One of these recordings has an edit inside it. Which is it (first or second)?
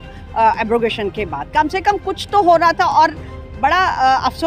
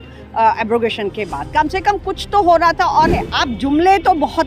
second